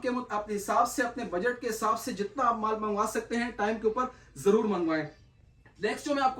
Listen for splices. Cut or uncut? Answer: uncut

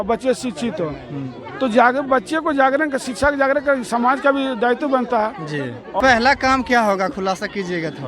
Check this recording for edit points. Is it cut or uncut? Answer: cut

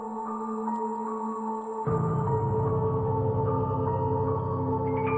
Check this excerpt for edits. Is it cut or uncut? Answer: cut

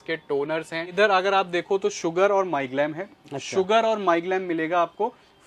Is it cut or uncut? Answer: cut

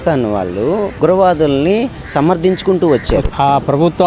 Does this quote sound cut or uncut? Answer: cut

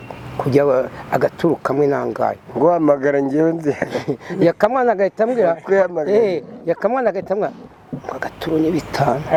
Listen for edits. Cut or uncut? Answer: uncut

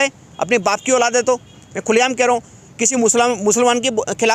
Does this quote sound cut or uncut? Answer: uncut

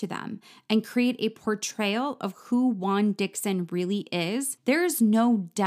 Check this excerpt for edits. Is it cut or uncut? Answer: cut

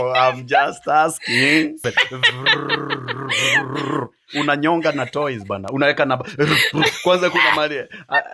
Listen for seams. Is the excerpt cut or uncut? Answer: cut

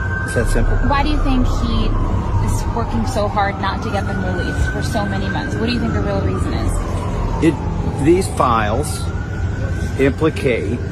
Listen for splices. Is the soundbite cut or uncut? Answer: uncut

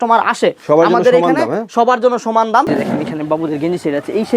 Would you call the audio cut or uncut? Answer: cut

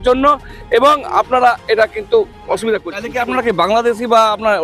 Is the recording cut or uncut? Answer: cut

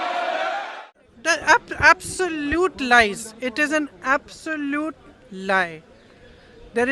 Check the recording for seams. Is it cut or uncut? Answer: cut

